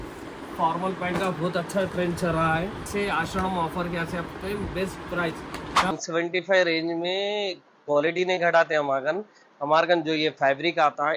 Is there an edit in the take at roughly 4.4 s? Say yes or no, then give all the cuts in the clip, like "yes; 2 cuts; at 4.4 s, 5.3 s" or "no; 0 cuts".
no; 2 cuts; at 2.9 s, 5.9 s